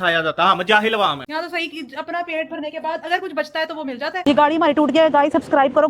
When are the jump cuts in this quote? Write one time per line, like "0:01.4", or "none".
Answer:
0:01.2
0:04.2